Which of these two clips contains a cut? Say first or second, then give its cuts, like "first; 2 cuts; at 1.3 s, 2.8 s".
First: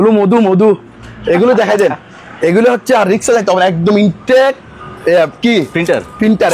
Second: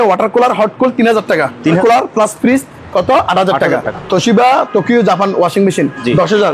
second; 2 cuts; at 1.8 s, 3.9 s